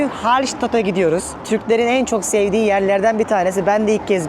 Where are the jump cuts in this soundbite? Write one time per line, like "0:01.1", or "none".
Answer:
0:01.3